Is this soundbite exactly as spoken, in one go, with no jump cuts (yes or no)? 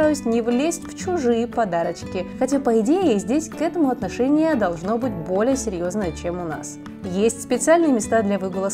yes